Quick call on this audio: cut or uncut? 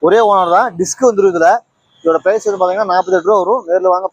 uncut